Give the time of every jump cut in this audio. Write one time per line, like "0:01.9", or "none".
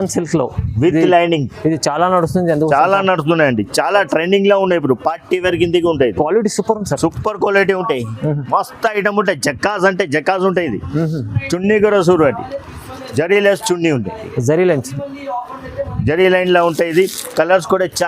none

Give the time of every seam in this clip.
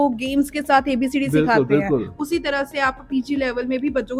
none

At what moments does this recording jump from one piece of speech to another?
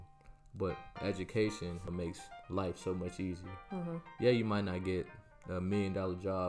0:01.0
0:01.9

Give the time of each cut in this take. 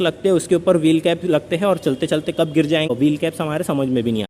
0:02.9

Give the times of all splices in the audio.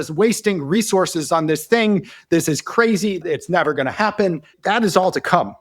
0:03.2
0:04.5

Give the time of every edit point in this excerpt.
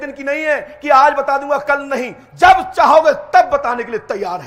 none

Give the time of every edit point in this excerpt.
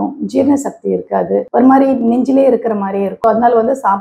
0:03.1

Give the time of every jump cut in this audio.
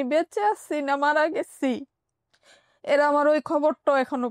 none

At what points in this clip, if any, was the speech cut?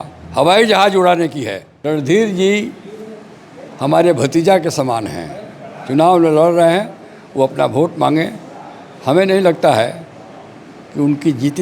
0:01.7

